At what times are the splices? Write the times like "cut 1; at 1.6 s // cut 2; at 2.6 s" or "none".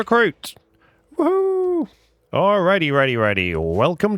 none

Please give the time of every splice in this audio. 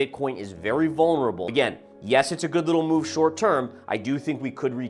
cut 1; at 1.5 s

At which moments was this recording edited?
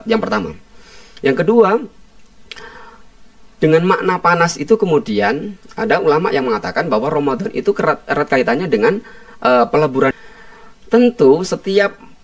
cut 1; at 10.1 s

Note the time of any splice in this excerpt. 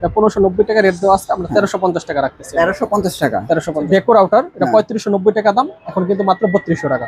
cut 1; at 4.0 s

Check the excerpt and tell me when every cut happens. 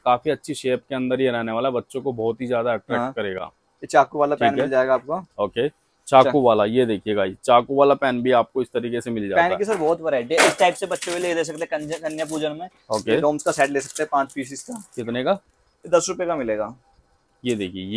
none

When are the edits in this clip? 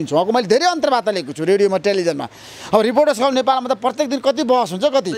none

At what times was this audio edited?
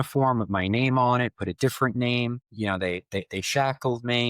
cut 1; at 2.4 s

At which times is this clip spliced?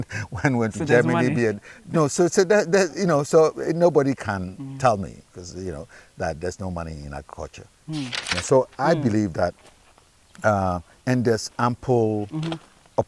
cut 1; at 8.3 s

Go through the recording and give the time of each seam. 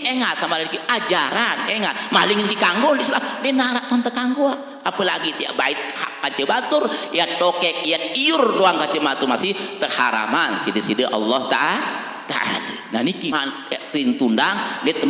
cut 1; at 13.3 s

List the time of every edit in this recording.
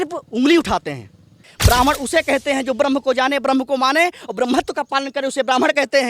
cut 1; at 1.5 s

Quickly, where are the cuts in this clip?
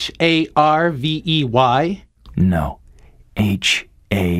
cut 1; at 2.0 s

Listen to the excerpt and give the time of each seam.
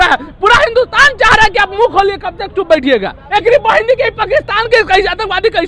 cut 1; at 3.2 s

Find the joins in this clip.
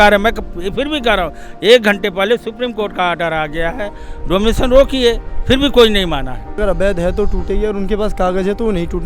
cut 1; at 6.6 s

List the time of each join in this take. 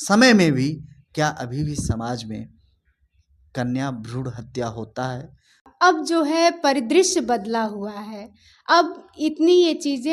cut 1; at 5.6 s

